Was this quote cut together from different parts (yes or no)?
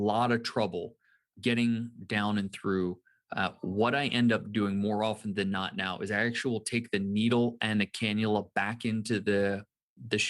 yes